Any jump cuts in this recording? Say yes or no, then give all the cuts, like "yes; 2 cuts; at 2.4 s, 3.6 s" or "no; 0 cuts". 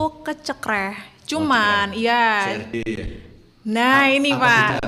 no; 0 cuts